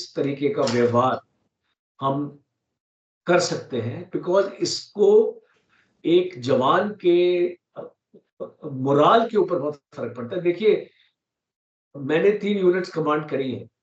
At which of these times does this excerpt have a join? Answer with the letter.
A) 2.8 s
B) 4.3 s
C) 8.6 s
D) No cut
D